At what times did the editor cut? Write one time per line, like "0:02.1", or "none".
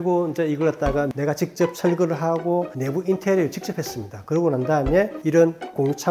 0:01.1